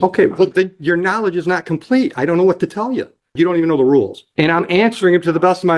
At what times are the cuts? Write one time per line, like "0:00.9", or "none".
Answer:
0:03.3
0:04.2